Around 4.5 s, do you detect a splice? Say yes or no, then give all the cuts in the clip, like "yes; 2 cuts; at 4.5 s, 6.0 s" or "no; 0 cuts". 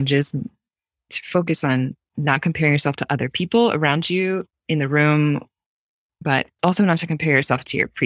no; 2 cuts; at 1.1 s, 6.2 s